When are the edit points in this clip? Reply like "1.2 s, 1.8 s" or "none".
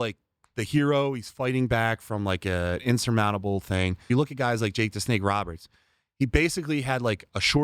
4.1 s